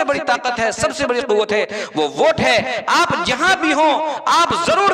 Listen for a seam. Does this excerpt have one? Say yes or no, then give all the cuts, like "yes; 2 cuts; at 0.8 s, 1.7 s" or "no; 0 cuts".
no; 0 cuts